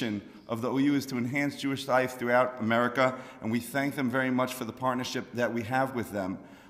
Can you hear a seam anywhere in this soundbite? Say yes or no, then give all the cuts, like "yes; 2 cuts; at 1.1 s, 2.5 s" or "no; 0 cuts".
no; 0 cuts